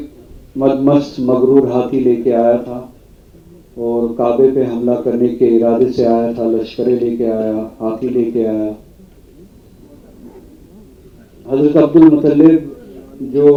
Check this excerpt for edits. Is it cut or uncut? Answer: uncut